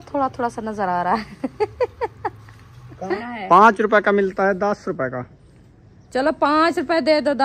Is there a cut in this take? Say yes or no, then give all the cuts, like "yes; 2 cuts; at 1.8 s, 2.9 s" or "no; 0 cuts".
yes; 1 cut; at 3.2 s